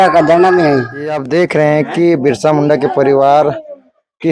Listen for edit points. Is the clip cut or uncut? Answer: cut